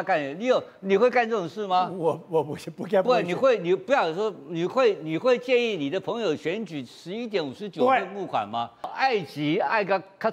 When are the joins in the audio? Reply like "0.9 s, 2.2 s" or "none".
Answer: 8.9 s